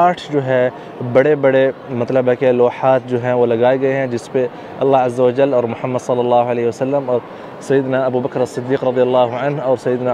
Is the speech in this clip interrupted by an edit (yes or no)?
no